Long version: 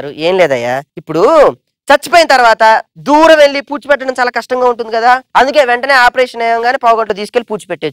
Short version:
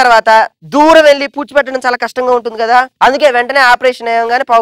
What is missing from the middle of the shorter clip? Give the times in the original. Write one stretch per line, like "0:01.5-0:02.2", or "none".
none